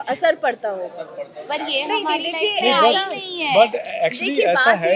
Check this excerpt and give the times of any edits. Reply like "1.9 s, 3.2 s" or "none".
none